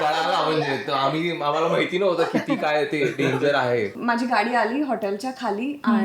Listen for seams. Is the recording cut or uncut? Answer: cut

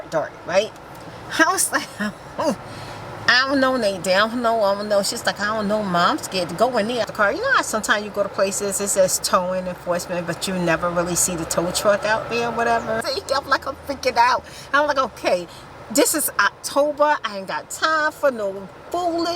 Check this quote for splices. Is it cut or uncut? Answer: cut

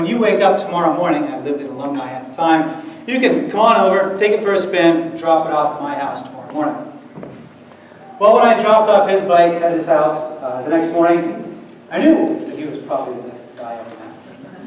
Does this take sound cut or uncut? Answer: uncut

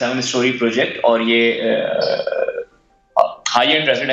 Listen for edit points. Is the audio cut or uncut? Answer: uncut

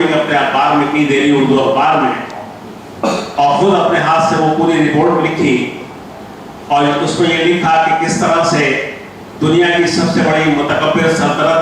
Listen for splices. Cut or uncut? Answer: uncut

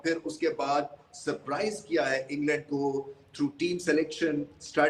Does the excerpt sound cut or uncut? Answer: uncut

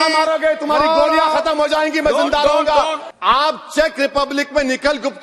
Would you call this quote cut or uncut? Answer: cut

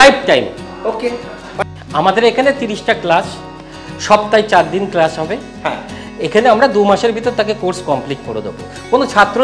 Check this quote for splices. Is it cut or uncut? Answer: cut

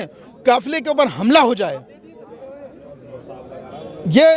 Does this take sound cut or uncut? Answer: uncut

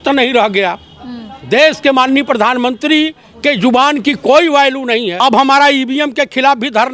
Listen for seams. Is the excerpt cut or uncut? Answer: cut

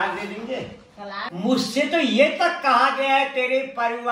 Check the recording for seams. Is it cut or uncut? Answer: cut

